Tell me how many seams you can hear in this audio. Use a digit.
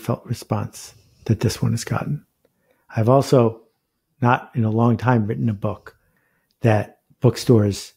1